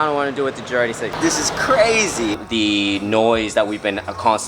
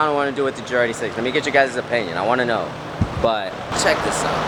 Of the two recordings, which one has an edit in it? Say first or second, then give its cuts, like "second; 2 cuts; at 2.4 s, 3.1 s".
first; 2 cuts; at 1.1 s, 2.4 s